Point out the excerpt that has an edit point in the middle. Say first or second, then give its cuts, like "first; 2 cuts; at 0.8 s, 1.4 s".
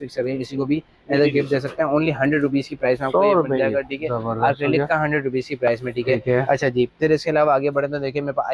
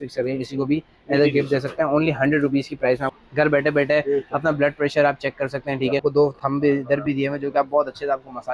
second; 2 cuts; at 3.1 s, 6.0 s